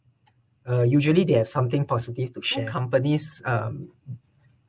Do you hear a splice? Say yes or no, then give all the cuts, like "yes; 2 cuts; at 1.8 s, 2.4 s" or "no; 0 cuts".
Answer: yes; 1 cut; at 2.8 s